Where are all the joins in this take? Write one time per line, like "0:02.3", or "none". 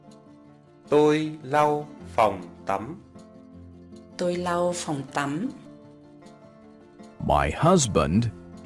0:05.6
0:07.2